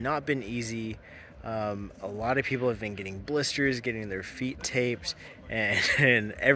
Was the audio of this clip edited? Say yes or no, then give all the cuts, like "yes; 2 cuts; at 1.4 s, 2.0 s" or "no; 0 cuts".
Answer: no; 0 cuts